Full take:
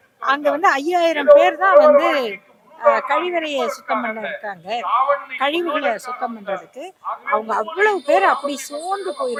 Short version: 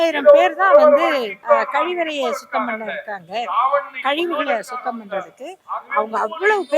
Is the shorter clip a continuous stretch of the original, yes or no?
no